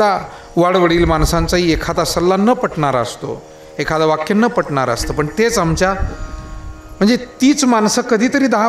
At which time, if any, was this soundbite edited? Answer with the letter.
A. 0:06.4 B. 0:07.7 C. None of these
C